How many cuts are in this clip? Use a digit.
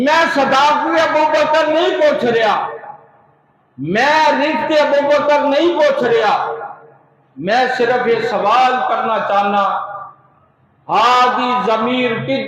0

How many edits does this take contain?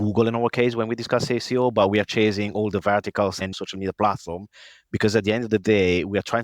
1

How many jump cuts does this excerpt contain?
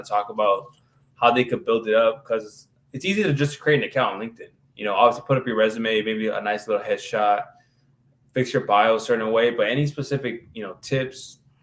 0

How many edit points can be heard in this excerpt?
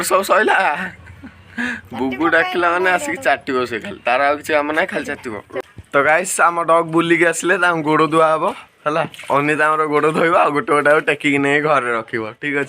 1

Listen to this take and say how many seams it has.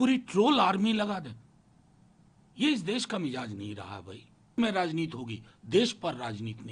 1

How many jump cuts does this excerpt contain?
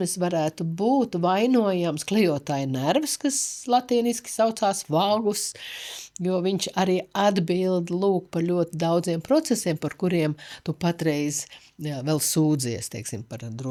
0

